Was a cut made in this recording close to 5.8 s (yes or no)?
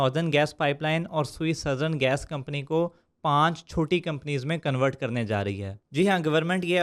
no